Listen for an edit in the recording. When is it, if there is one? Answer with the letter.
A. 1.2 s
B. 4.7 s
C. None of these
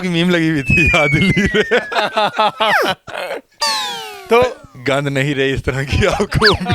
B